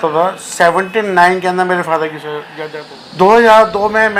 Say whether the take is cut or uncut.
cut